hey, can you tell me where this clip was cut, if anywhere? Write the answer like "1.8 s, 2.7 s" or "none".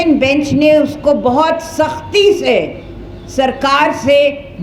none